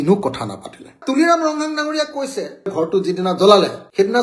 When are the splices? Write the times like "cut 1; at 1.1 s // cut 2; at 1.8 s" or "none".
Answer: cut 1; at 2.7 s